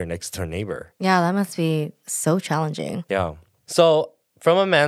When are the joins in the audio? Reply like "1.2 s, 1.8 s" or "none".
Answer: 0.9 s, 2.0 s, 3.2 s

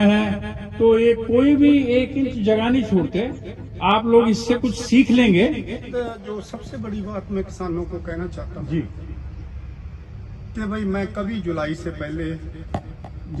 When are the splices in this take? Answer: 5.9 s

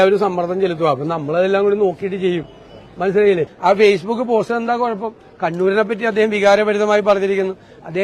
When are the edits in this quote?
3.5 s

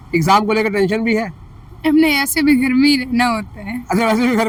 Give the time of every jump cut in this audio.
none

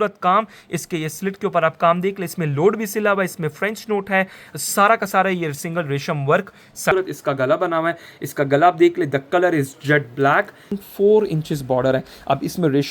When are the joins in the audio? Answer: 6.9 s, 10.8 s

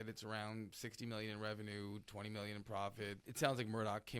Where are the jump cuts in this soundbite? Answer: 3.3 s

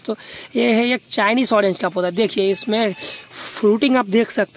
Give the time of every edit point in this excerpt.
none

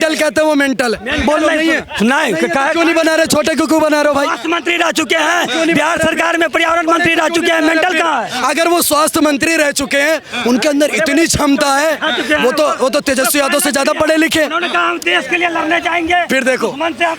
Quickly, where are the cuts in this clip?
none

